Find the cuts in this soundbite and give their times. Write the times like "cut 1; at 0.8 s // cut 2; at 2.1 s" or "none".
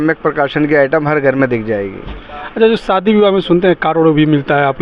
none